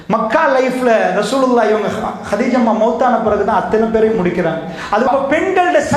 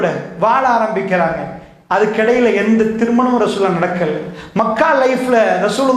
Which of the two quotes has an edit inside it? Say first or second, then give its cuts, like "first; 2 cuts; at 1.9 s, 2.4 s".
first; 1 cut; at 5.1 s